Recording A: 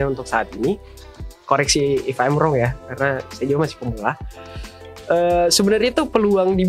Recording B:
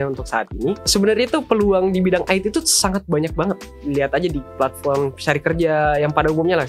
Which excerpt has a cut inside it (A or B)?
B